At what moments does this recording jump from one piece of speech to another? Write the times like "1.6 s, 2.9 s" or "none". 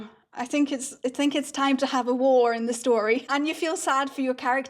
3.3 s